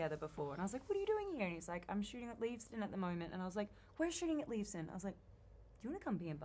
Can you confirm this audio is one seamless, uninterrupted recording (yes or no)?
yes